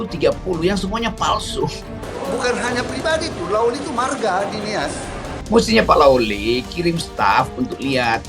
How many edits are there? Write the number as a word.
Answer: two